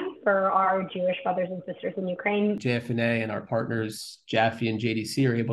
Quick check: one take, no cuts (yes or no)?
no